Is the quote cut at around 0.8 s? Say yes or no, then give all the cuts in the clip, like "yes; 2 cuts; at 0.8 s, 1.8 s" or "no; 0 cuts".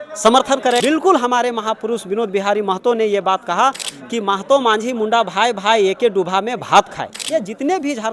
yes; 3 cuts; at 0.8 s, 3.9 s, 7.2 s